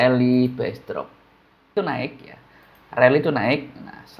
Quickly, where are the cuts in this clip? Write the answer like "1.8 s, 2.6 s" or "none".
1.8 s